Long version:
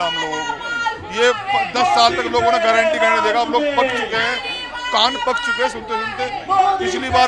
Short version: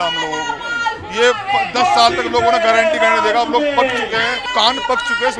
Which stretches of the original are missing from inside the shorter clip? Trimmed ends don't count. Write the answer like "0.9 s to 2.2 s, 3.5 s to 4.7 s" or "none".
4.4 s to 4.8 s